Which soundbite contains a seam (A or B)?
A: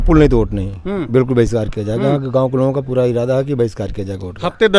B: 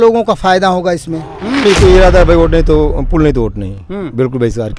B